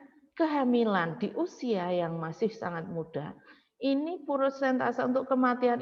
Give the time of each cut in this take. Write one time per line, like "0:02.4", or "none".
none